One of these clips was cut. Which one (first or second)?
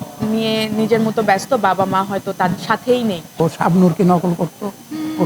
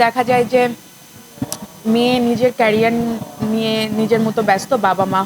first